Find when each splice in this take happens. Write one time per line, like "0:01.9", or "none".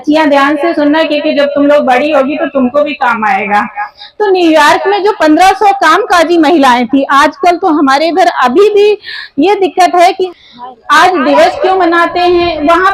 0:10.3